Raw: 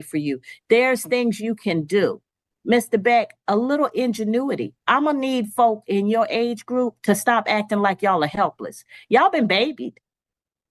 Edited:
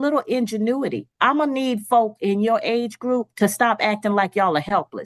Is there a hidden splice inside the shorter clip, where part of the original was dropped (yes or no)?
no